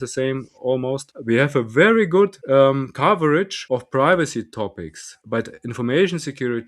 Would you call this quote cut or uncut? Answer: cut